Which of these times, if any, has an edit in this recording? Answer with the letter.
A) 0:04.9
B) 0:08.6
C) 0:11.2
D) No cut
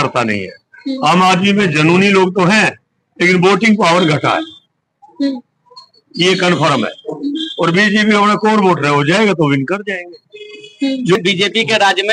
C